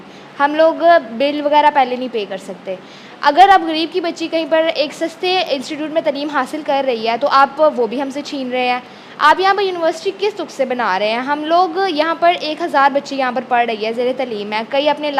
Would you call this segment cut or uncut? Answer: uncut